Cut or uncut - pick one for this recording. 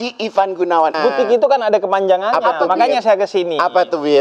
cut